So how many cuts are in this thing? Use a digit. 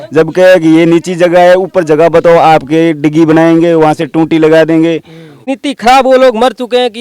1